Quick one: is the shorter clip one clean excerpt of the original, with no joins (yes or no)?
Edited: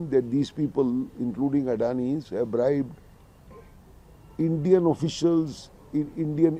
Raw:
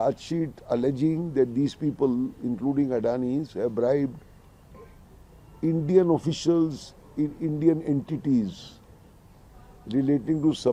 yes